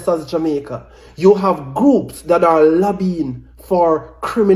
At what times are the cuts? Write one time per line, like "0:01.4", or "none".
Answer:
none